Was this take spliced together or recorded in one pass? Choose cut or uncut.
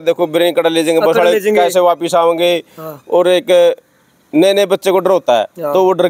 uncut